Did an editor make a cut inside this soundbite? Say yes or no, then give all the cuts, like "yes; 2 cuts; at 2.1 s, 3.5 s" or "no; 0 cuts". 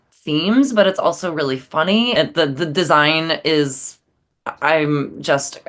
yes; 1 cut; at 2.1 s